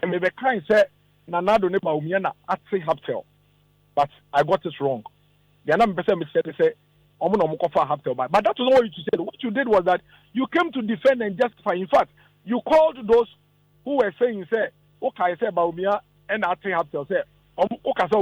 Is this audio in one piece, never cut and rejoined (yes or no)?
yes